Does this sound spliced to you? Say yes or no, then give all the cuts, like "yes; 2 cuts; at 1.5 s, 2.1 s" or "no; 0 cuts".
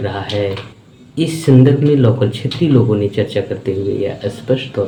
no; 0 cuts